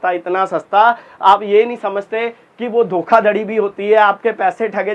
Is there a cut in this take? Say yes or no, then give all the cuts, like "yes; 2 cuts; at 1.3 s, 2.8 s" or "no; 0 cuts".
no; 0 cuts